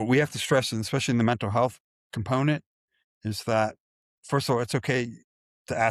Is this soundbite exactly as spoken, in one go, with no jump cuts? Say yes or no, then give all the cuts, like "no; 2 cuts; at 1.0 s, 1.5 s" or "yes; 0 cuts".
yes; 0 cuts